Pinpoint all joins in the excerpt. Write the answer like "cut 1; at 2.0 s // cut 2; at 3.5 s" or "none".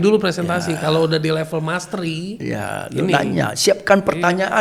none